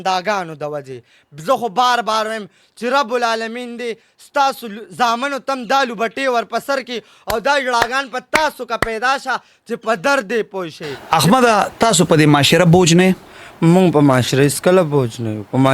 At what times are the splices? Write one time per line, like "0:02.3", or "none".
0:10.9

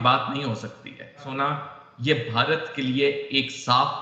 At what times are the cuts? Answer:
0:01.3

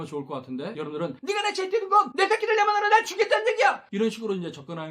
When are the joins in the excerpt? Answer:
0:01.0
0:02.1

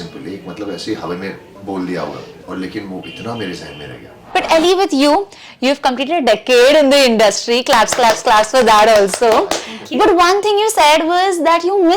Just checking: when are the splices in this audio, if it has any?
0:01.5
0:02.3
0:04.1

